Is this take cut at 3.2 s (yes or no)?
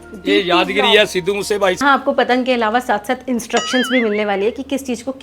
no